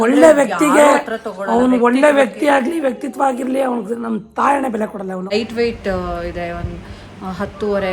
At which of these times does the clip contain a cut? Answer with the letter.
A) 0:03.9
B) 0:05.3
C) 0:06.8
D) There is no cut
B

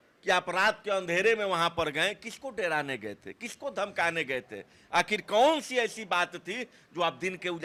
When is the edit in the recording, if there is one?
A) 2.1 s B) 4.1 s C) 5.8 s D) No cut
D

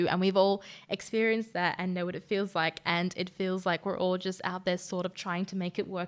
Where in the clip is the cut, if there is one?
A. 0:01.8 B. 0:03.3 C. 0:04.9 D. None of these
D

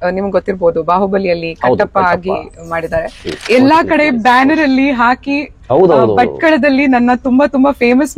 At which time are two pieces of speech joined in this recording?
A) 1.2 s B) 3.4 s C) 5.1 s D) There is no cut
B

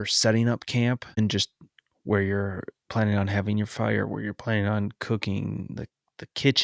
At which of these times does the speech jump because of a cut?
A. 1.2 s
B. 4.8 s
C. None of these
A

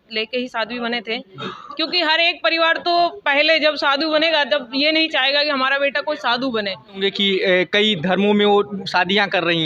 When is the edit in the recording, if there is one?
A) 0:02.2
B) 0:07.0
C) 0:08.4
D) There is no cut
B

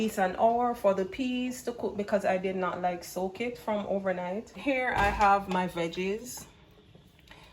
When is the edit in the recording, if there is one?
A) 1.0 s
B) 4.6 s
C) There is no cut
B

